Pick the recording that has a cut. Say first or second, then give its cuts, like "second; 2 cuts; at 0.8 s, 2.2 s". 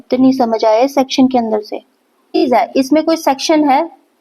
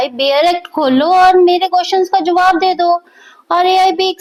first; 1 cut; at 2.4 s